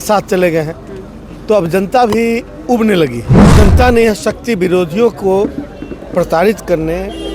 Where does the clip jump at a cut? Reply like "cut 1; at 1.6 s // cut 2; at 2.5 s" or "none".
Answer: cut 1; at 3.4 s